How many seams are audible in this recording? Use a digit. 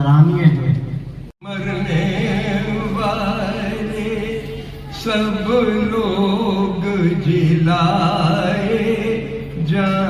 1